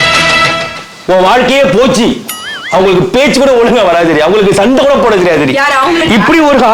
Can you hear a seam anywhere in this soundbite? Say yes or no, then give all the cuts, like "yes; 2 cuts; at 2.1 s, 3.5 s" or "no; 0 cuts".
yes; 1 cut; at 2.5 s